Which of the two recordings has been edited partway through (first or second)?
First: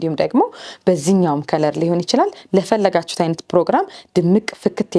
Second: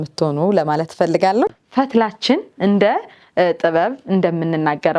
second